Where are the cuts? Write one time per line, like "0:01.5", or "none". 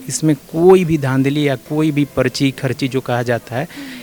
none